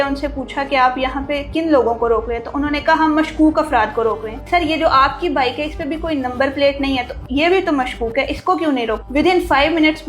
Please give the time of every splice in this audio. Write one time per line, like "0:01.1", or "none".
0:04.4
0:09.0